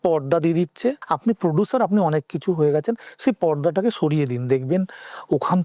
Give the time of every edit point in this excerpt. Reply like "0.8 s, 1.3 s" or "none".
1.1 s